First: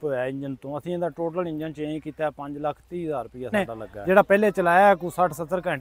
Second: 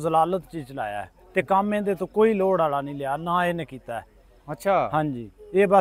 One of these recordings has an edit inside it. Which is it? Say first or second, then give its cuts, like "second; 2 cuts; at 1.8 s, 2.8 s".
first; 1 cut; at 3.5 s